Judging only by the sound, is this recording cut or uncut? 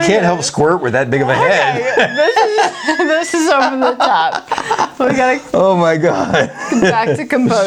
uncut